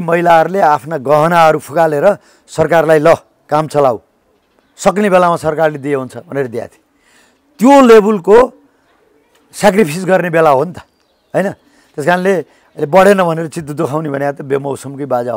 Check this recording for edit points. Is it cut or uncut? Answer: uncut